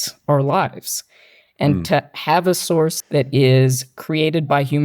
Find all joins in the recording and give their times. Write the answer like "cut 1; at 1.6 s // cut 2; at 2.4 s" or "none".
cut 1; at 3.0 s